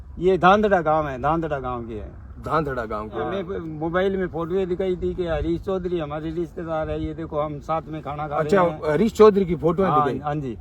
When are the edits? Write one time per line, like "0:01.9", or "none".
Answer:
0:03.4